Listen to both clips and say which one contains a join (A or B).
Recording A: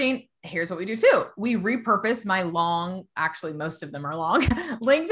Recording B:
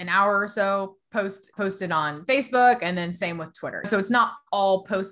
B